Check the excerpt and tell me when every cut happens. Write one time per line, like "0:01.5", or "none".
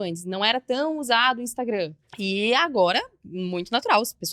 0:02.0